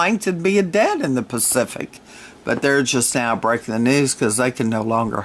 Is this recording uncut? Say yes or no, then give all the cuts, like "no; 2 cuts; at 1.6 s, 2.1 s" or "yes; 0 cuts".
no; 1 cut; at 4.1 s